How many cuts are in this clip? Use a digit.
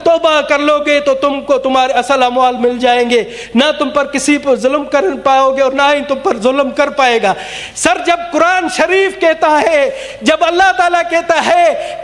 0